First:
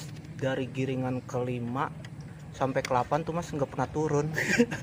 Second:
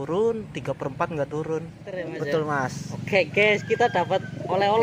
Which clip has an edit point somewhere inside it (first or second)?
second